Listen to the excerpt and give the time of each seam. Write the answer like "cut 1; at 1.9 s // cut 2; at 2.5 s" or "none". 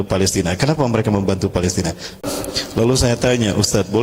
cut 1; at 2.2 s